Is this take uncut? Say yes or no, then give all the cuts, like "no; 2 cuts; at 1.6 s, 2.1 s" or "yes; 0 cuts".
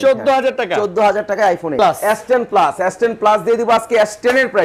no; 1 cut; at 1.8 s